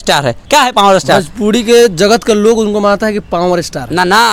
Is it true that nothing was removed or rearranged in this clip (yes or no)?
yes